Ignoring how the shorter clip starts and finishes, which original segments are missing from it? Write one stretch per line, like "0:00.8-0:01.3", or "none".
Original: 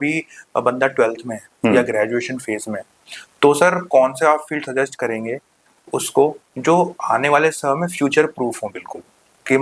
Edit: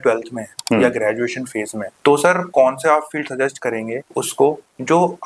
0:02.8-0:03.2
0:05.4-0:05.8